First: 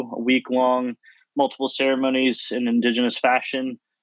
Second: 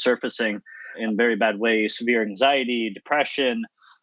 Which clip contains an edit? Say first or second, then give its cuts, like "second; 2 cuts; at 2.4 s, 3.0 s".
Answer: second; 1 cut; at 1.0 s